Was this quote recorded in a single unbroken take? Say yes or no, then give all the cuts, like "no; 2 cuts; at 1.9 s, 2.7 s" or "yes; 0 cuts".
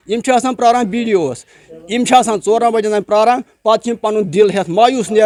yes; 0 cuts